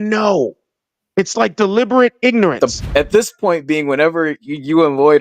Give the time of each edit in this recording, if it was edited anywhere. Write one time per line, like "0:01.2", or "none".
0:02.8